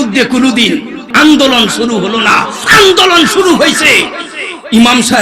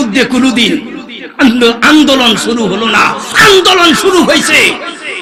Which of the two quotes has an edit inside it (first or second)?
first